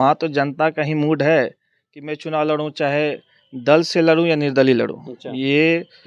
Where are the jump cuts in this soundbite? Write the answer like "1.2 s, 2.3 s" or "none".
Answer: none